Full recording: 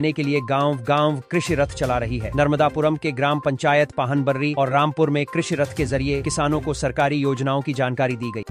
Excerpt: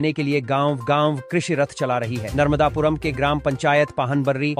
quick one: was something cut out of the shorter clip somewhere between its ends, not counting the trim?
no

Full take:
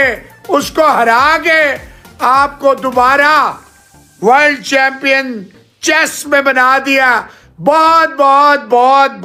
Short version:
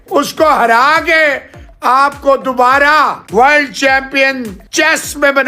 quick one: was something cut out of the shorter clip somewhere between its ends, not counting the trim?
yes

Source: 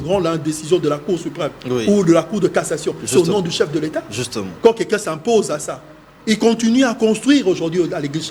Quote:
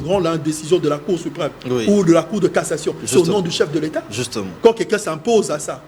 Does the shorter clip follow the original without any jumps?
yes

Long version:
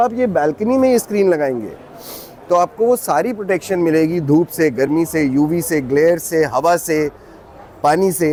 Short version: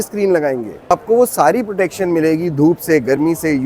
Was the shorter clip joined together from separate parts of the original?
yes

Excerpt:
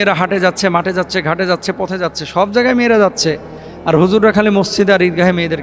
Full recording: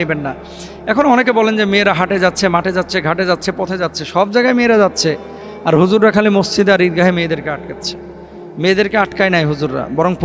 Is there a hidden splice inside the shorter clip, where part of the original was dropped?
no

